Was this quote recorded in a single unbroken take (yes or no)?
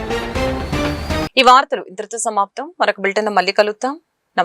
yes